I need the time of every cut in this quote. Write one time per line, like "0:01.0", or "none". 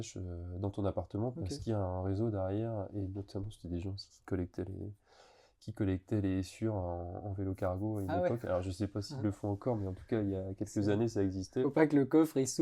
none